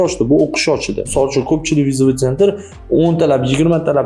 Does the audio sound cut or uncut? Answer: cut